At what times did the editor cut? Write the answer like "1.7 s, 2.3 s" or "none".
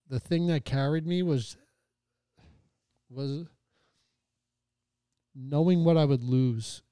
2.9 s